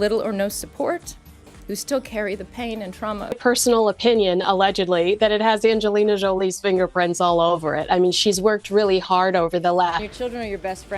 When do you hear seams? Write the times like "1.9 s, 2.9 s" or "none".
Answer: 3.2 s, 10.0 s